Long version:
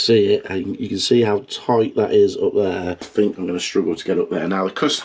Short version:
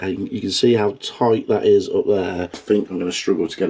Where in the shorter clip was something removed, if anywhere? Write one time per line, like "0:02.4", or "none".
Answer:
none